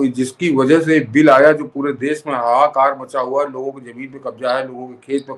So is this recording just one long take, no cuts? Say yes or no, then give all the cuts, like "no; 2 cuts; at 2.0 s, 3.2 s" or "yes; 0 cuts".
yes; 0 cuts